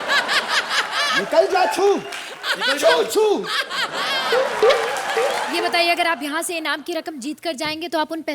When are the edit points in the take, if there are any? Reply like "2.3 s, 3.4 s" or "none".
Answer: 5.5 s